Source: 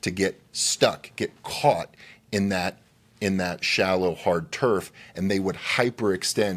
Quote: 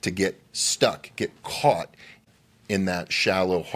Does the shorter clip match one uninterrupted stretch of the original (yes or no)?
no